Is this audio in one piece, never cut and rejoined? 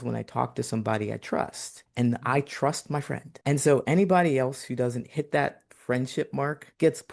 yes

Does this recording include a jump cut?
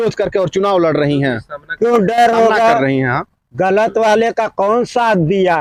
no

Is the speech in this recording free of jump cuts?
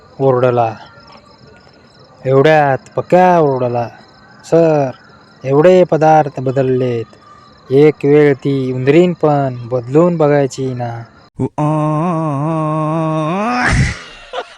no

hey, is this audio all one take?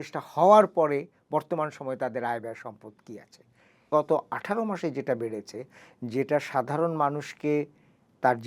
no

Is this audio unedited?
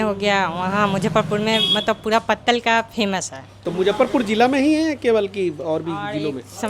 yes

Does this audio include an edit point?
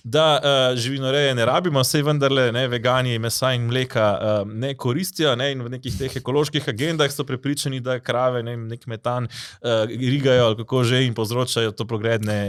no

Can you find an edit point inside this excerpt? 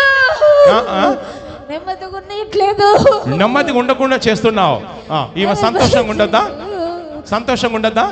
no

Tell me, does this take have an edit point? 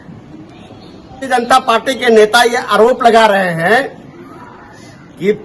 yes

